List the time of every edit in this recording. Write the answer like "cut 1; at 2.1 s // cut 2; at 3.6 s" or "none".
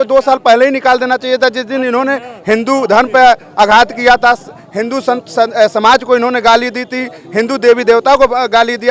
none